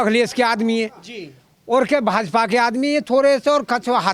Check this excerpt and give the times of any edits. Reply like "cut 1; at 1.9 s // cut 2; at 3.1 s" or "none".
none